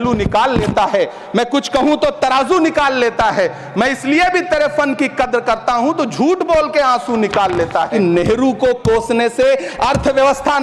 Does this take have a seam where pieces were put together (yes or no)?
no